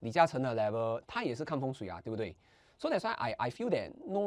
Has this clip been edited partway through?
no; 0 cuts

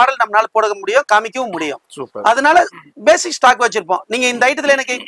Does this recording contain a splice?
no; 0 cuts

